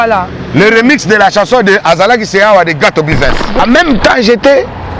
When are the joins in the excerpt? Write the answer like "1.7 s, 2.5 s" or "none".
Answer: 3.5 s